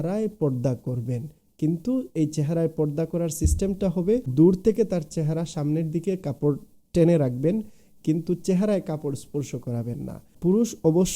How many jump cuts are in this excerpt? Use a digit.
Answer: 2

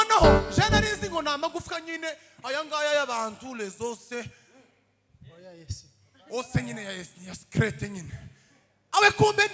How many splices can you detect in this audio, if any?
0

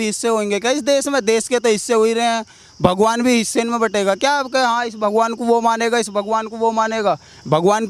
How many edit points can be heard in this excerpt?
0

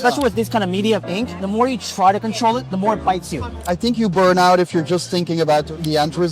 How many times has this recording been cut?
2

